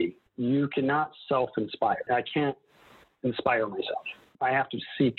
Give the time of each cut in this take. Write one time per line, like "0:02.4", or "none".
none